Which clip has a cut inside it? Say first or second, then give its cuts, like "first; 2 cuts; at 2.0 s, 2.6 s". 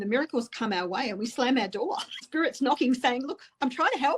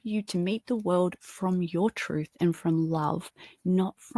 first; 1 cut; at 2.3 s